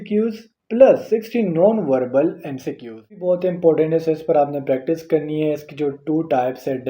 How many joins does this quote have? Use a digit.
1